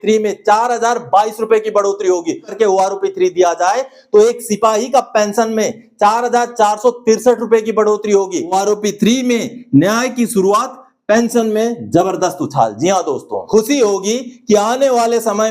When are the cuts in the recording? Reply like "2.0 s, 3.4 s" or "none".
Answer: 2.5 s, 8.5 s, 13.3 s